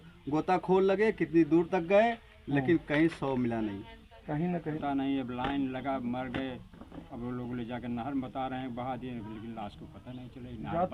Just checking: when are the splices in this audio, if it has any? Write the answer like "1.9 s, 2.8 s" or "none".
4.8 s